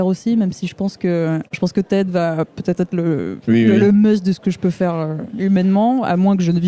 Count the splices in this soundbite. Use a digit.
1